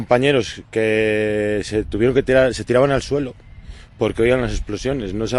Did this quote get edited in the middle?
no; 0 cuts

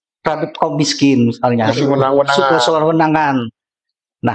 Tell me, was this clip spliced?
no; 0 cuts

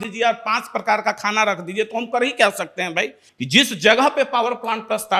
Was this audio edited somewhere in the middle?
yes; 1 cut; at 3.2 s

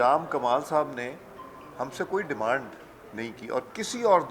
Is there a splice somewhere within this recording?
no; 0 cuts

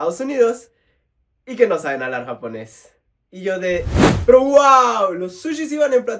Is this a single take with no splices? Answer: no; 1 cut; at 3.9 s

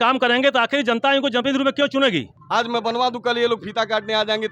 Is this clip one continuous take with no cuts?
no; 1 cut; at 2.4 s

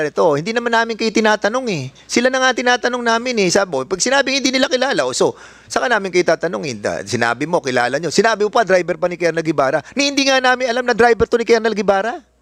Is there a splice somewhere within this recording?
no; 0 cuts

